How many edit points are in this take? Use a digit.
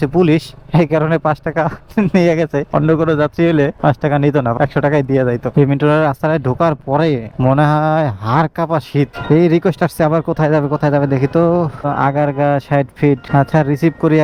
0